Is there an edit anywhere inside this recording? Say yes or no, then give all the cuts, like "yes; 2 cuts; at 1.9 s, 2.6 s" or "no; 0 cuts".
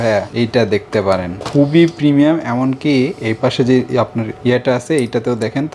no; 0 cuts